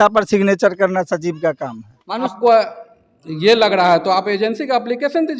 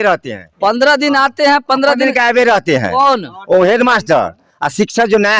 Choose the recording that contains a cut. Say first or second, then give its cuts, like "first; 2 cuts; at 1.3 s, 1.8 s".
first; 1 cut; at 2.3 s